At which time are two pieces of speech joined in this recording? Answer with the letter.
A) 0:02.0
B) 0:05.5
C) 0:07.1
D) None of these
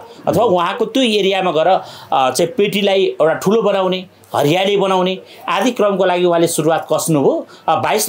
D